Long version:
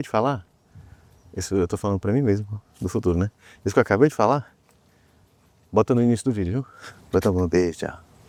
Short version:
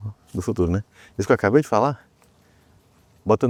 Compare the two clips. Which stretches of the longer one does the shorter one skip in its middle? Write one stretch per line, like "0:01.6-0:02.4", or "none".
none